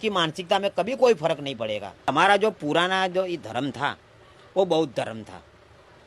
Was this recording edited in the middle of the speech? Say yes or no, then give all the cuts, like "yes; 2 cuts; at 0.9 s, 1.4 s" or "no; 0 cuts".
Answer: yes; 1 cut; at 2.1 s